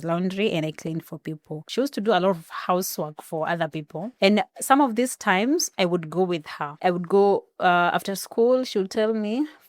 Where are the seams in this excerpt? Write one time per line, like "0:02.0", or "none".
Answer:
0:01.6
0:04.0
0:06.6